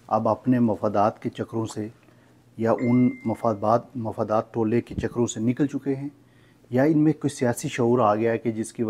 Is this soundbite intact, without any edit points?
yes; 0 cuts

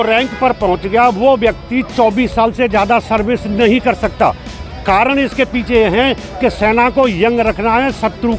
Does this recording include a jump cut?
no; 0 cuts

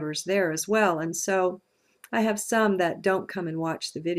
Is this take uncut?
no; 1 cut; at 1.1 s

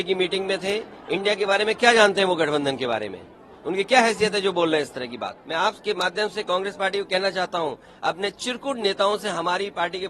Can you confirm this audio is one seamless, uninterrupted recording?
no; 1 cut; at 5.4 s

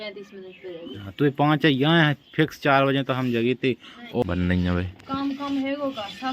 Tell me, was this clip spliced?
yes; 1 cut; at 4.2 s

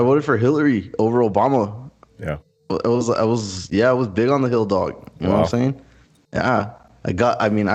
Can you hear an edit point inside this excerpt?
no; 0 cuts

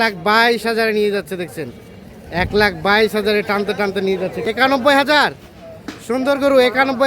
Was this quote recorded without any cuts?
no; 1 cut; at 4.4 s

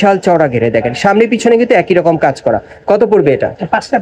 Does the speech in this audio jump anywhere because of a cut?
no; 0 cuts

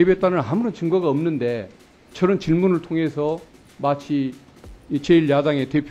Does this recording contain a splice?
no; 0 cuts

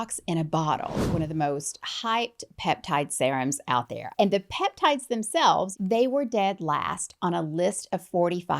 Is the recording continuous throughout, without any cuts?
no; 3 cuts; at 1.1 s, 4.0 s, 5.7 s

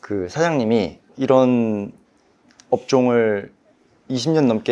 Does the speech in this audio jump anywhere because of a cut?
yes; 1 cut; at 1.0 s

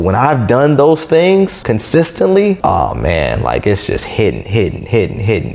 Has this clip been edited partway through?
yes; 2 cuts; at 1.6 s, 2.6 s

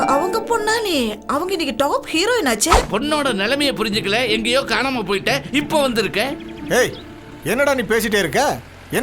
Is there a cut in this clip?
yes; 1 cut; at 2.9 s

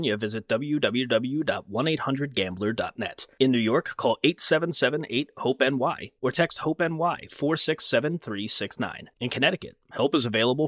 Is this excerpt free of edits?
yes; 0 cuts

